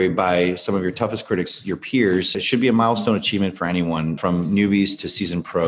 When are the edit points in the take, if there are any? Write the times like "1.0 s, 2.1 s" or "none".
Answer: 2.4 s, 4.2 s